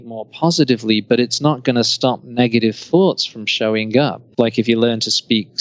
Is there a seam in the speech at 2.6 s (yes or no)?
no